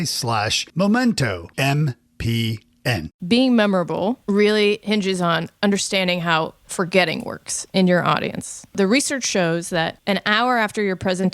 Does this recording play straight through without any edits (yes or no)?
no